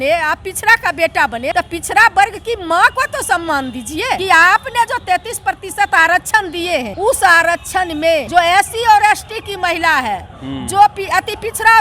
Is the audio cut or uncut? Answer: cut